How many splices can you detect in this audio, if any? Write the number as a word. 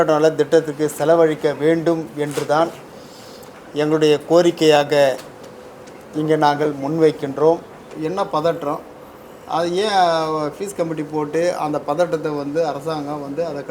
one